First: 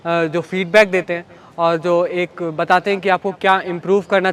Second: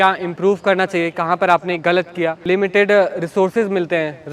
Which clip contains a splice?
second; 1 cut; at 2.4 s

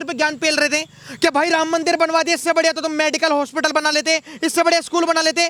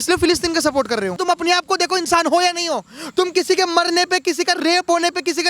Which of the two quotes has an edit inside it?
second; 1 cut; at 1.2 s

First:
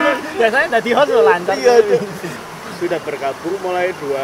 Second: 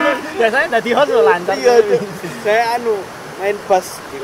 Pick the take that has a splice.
first; 1 cut; at 2.3 s

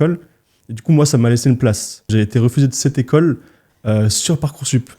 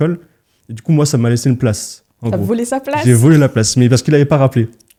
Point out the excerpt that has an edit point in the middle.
first; 1 cut; at 2.1 s

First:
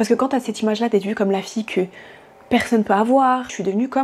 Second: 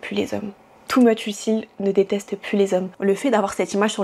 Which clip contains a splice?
second; 1 cut; at 3.1 s

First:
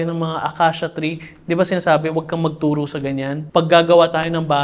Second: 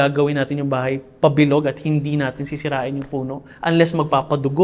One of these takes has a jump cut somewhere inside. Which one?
first; 1 cut; at 3.4 s

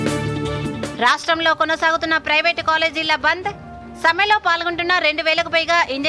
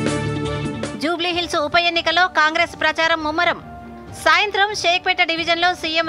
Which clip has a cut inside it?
second; 1 cut; at 0.9 s

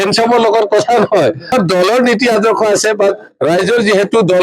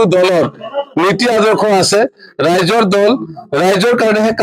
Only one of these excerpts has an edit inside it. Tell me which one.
first; 1 cut; at 1.5 s

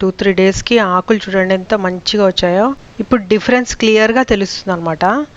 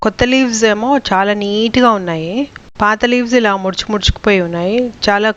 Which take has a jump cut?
first; 1 cut; at 2.9 s

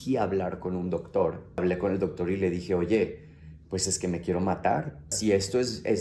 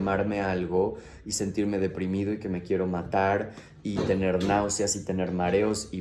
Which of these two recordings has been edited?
first; 2 cuts; at 1.6 s, 5.2 s

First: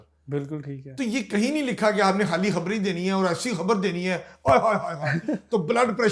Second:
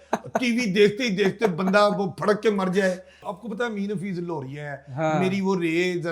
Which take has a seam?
second; 1 cut; at 3.3 s

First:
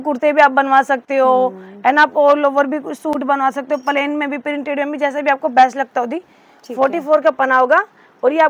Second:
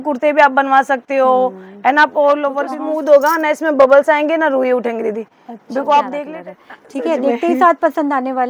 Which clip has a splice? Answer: second; 2 cuts; at 2.7 s, 6.3 s

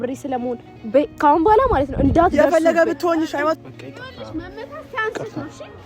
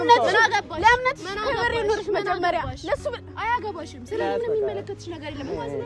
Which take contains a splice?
first; 1 cut; at 3.7 s

